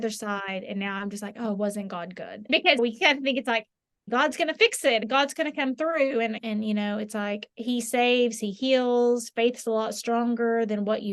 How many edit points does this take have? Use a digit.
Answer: 4